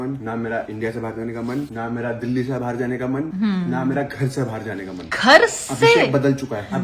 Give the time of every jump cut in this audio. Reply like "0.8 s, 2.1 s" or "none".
none